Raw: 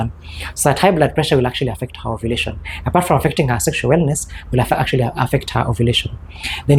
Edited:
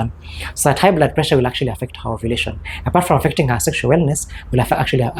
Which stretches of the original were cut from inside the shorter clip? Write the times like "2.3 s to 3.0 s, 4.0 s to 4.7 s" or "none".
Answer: none